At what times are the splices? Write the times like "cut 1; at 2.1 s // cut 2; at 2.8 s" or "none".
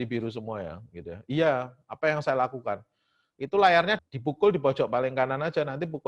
cut 1; at 4.0 s